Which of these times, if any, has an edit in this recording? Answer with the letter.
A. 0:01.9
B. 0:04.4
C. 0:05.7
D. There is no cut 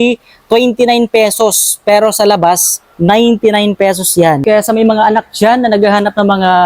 B